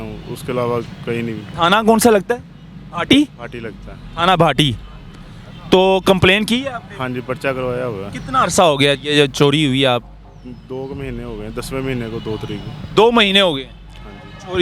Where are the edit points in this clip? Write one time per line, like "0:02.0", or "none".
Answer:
none